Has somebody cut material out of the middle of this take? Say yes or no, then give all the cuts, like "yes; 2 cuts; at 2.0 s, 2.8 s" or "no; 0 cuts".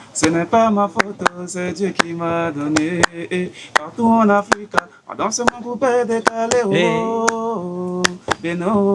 no; 0 cuts